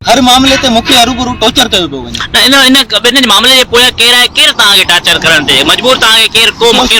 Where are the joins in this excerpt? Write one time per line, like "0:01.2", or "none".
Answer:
none

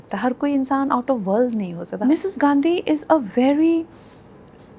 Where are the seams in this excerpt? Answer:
0:02.0

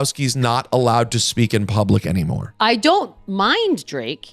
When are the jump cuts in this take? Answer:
0:02.4

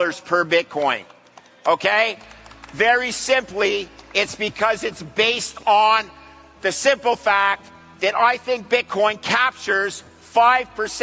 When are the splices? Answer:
none

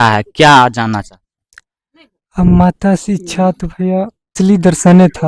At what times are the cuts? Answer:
0:04.3

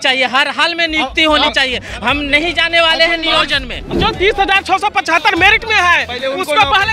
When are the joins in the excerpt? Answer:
0:03.9

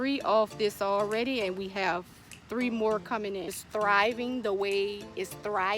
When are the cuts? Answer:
0:03.6

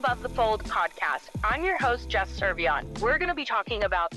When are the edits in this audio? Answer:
none

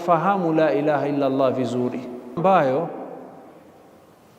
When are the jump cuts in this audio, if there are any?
0:02.4

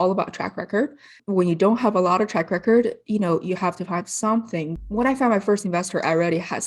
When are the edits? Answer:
0:01.2
0:04.7

